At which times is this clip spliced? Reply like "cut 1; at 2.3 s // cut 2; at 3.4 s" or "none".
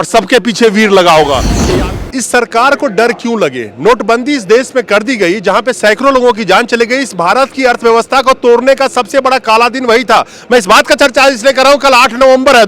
cut 1; at 1.5 s